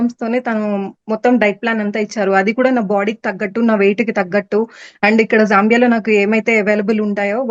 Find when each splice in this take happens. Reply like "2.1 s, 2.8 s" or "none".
none